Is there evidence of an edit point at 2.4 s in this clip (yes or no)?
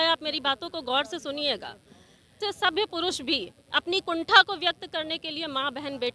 yes